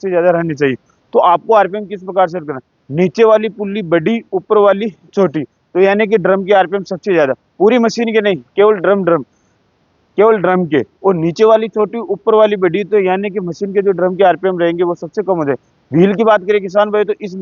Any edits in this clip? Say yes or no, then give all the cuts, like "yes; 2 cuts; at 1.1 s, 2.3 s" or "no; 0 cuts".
no; 0 cuts